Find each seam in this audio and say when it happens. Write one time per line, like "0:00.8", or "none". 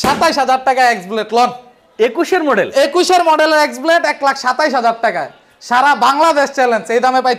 none